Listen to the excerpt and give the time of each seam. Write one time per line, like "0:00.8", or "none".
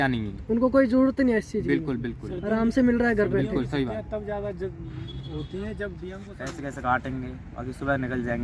0:06.2